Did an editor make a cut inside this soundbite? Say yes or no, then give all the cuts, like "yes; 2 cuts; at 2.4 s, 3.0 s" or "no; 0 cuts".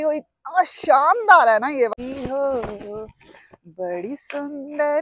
yes; 1 cut; at 1.9 s